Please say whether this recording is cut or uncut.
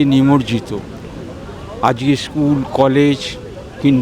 uncut